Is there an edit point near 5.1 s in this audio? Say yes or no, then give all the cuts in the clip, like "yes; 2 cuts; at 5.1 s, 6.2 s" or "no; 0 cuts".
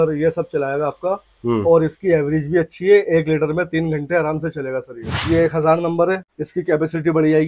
yes; 2 cuts; at 5.1 s, 6.3 s